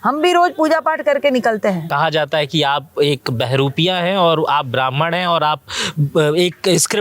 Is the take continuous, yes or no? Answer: no